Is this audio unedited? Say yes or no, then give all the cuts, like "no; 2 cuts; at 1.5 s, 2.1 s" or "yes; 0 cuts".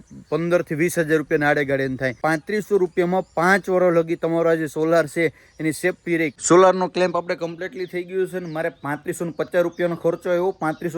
no; 2 cuts; at 2.2 s, 6.3 s